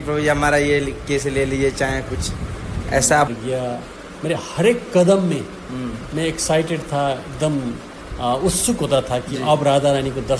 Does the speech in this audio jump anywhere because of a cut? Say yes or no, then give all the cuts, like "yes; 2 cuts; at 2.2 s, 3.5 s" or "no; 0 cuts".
yes; 1 cut; at 3.3 s